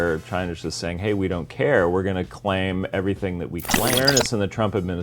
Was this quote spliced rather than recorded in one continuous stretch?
yes; 1 cut; at 3.9 s

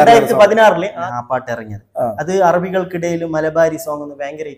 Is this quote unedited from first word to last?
no; 1 cut; at 1.0 s

